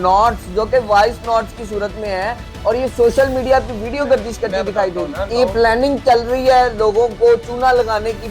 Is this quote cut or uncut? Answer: cut